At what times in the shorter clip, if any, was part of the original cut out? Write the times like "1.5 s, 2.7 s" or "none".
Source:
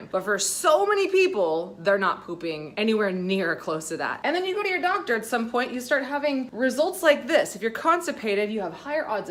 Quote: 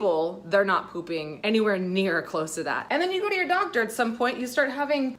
none